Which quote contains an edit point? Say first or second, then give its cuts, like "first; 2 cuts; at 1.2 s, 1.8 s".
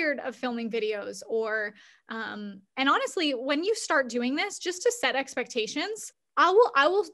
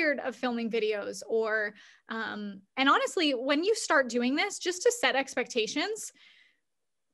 first; 1 cut; at 6.2 s